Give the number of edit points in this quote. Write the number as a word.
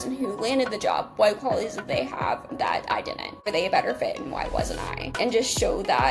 two